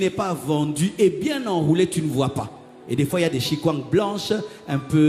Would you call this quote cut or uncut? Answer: uncut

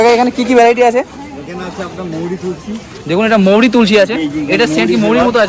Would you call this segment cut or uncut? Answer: uncut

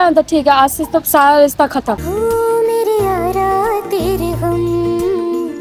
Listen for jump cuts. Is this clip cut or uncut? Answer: uncut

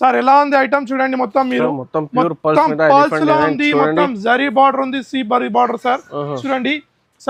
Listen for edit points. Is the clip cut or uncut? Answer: uncut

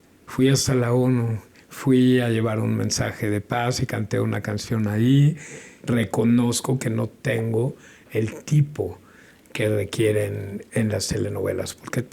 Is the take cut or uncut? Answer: cut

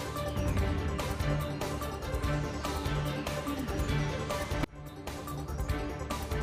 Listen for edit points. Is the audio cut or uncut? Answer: uncut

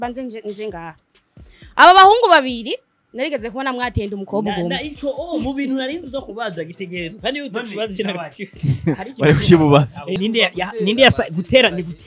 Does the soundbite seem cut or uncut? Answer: cut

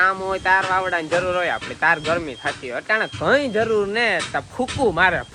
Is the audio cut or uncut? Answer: uncut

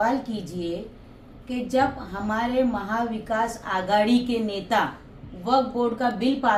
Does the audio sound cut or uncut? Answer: uncut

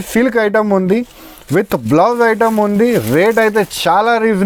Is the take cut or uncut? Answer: uncut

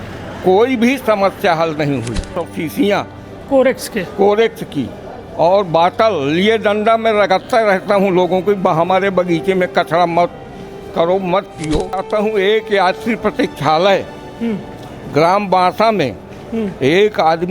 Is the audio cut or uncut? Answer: cut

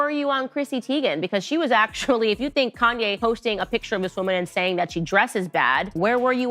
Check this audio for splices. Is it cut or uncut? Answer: uncut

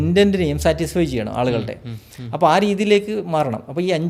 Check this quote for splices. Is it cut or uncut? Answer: uncut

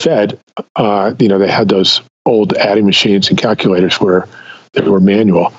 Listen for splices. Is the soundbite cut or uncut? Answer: cut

